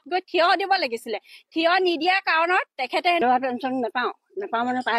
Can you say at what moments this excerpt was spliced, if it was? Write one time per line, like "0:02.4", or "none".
0:03.2